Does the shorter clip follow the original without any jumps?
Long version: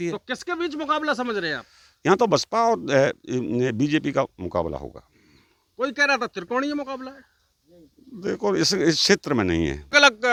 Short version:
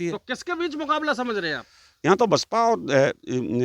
yes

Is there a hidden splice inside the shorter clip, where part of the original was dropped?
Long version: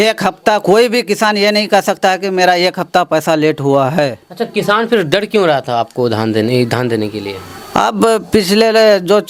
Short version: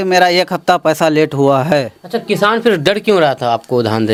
no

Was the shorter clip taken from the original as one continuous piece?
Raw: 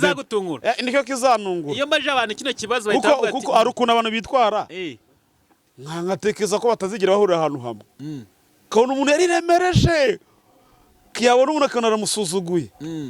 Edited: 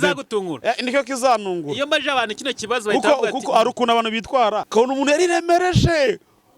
no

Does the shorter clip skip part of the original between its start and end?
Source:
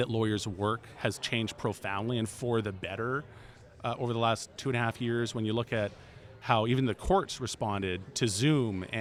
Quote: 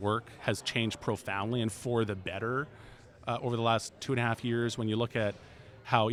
no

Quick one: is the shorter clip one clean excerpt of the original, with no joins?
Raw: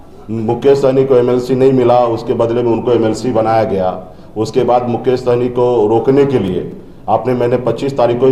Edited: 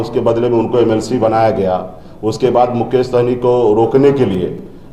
yes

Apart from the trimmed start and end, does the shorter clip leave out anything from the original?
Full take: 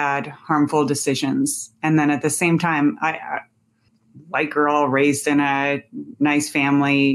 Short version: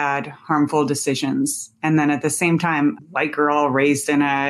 yes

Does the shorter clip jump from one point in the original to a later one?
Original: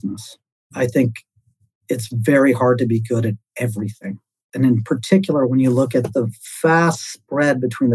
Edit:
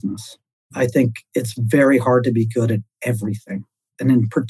yes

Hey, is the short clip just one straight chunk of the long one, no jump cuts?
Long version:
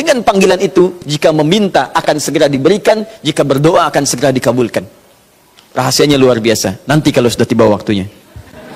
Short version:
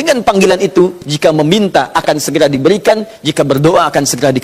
yes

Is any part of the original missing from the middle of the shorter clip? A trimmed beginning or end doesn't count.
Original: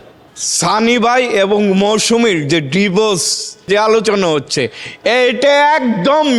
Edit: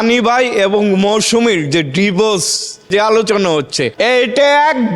yes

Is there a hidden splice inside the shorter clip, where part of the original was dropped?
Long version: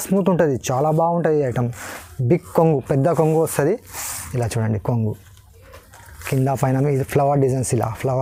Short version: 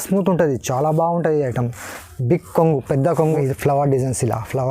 yes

